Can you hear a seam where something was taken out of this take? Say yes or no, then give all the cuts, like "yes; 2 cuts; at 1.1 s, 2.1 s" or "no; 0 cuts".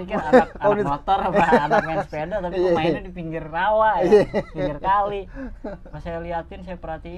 yes; 1 cut; at 5.9 s